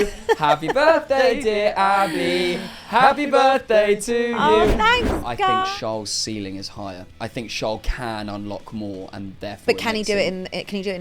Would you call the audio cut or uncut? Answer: cut